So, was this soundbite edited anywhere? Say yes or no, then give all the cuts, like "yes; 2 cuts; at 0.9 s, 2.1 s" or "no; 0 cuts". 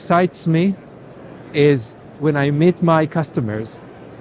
yes; 1 cut; at 2.1 s